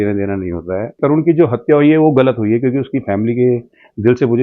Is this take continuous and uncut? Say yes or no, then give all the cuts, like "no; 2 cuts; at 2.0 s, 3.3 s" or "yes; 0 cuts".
no; 1 cut; at 1.0 s